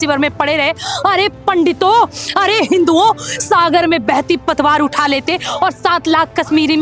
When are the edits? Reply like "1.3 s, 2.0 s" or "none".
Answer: none